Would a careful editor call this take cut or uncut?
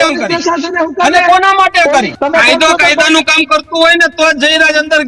cut